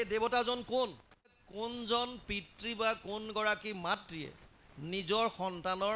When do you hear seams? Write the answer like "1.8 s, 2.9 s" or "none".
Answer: 1.3 s